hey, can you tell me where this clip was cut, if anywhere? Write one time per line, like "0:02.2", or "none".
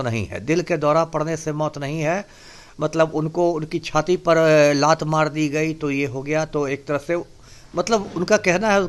none